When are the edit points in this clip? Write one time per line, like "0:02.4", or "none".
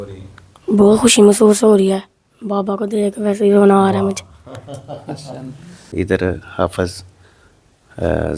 0:05.9